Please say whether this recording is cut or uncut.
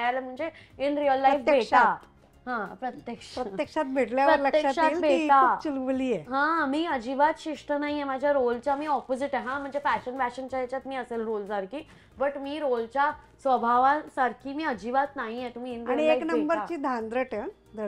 uncut